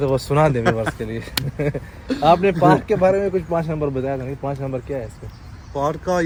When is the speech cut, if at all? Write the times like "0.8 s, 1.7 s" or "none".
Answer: none